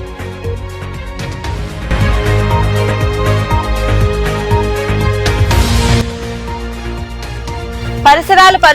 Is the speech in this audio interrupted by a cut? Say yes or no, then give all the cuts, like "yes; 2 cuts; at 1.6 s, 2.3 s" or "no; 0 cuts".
yes; 1 cut; at 1.2 s